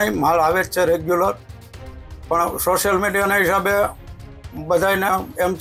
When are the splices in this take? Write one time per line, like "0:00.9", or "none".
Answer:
none